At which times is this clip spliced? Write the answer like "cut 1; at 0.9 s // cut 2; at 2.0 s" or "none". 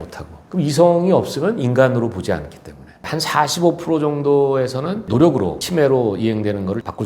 cut 1; at 3.0 s